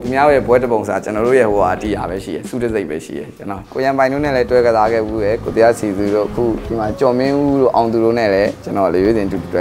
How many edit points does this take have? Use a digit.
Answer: 1